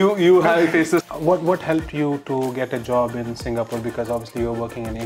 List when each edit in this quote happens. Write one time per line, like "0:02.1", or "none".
0:01.0